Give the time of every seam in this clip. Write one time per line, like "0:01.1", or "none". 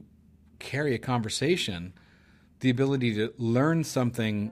none